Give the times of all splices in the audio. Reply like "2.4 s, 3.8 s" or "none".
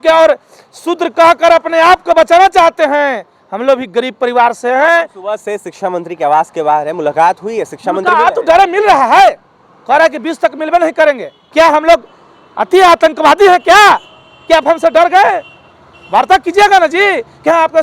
11.4 s

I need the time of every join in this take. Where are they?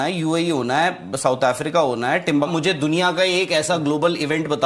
2.5 s

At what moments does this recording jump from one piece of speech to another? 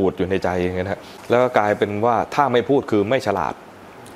1.1 s

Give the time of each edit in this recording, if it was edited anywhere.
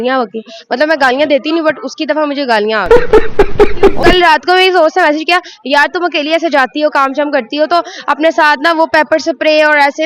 4.1 s

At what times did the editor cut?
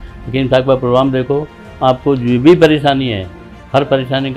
none

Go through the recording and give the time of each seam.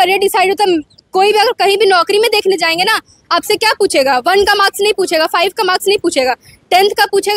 none

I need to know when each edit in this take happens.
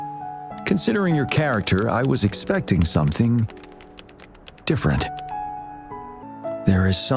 6.3 s

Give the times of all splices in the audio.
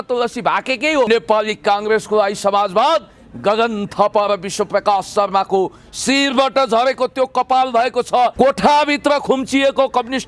1.1 s, 8.3 s

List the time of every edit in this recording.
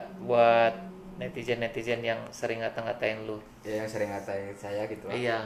none

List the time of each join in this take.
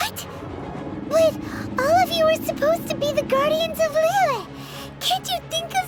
none

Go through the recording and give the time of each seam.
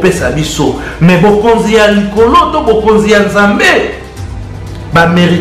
none

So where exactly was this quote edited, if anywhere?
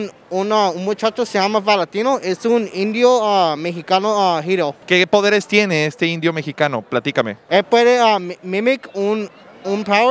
4.8 s, 7.4 s

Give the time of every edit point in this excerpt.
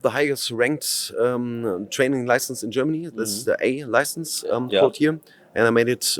none

